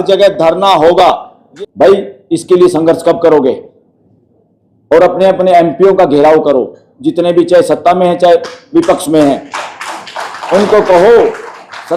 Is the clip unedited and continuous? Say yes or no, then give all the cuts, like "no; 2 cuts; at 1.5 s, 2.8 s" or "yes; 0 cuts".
no; 1 cut; at 1.4 s